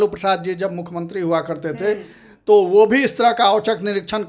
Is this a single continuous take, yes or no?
yes